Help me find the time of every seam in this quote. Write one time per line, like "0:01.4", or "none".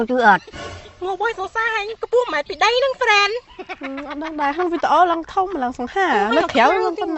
none